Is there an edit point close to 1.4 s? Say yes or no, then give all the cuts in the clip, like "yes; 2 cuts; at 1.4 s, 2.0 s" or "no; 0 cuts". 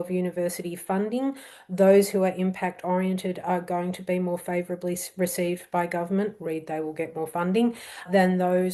no; 0 cuts